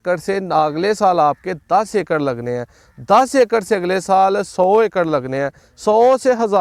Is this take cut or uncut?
uncut